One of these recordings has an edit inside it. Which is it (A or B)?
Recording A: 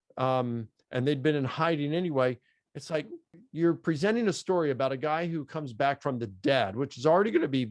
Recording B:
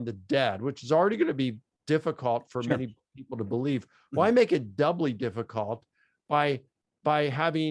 A